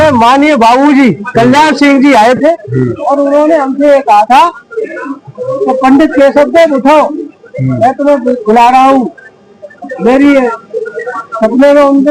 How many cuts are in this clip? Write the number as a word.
zero